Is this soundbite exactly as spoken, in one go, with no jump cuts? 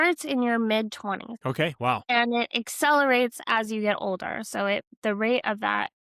no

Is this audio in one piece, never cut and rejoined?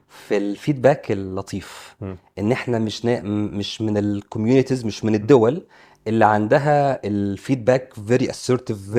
yes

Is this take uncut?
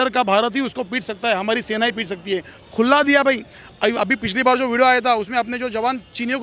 yes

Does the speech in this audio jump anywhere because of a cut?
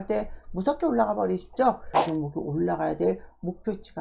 yes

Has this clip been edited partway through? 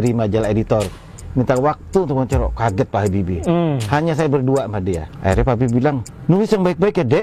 yes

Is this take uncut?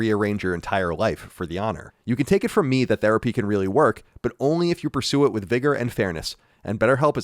no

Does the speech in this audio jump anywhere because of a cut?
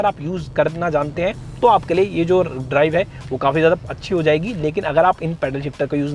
no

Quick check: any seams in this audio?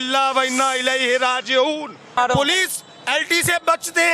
yes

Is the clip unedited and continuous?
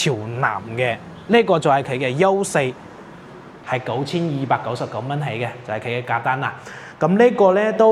no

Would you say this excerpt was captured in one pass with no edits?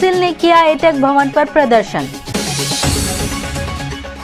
yes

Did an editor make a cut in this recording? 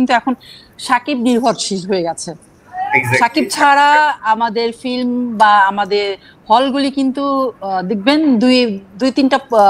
no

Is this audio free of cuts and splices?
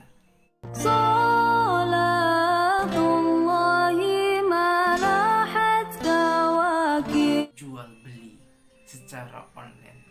no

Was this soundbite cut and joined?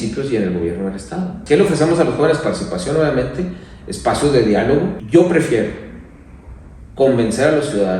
yes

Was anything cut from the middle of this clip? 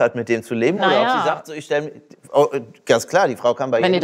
no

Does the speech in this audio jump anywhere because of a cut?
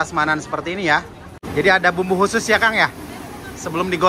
yes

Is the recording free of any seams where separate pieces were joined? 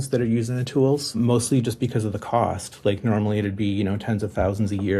no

